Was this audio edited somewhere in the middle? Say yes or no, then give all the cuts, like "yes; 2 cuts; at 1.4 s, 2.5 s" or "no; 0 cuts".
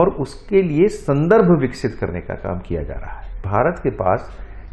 yes; 1 cut; at 3.4 s